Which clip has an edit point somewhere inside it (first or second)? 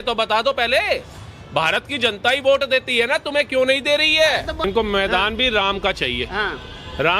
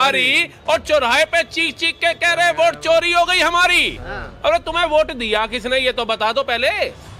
first